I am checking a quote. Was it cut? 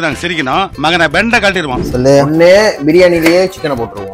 yes; 1 cut; at 1.8 s

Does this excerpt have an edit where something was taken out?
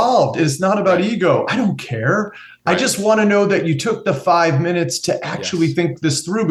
no; 0 cuts

